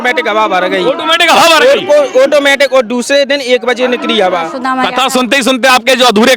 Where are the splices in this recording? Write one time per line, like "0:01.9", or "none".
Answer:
0:04.5